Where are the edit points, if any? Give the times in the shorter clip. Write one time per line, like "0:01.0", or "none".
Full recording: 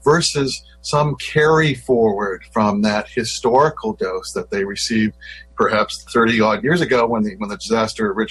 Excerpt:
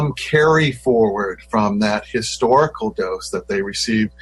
none